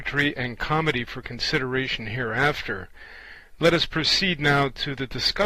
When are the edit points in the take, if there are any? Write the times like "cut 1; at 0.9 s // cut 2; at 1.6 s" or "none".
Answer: cut 1; at 2.1 s